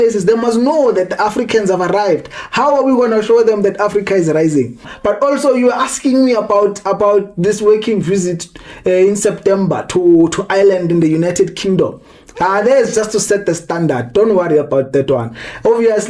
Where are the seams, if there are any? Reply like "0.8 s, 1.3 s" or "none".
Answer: 4.9 s